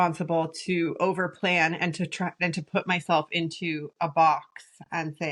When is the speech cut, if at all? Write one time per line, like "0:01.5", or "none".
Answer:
none